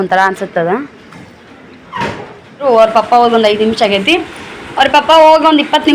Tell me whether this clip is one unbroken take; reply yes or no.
no